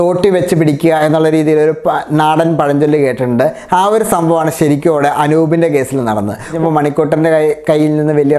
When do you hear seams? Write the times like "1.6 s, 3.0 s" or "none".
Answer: 6.5 s